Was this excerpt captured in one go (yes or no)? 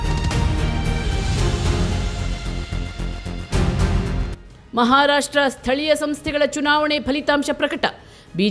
no